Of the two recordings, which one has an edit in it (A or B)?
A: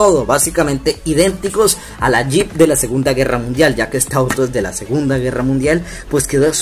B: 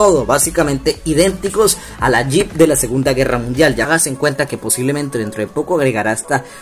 B